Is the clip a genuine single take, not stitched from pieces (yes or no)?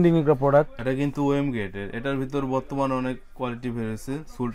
yes